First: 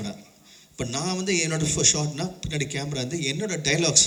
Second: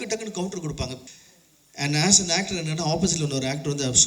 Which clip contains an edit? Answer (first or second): second